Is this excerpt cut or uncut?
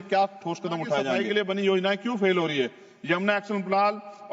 cut